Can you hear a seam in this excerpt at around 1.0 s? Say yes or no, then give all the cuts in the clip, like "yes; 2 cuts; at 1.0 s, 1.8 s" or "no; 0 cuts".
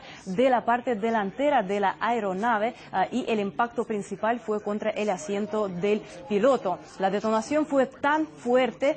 no; 1 cut; at 3.5 s